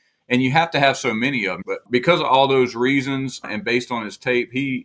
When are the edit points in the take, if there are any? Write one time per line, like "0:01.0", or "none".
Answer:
0:01.8
0:03.4